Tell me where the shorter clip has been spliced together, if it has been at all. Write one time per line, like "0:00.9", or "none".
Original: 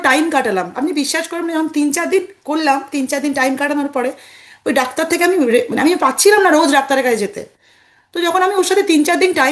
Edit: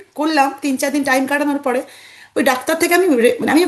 none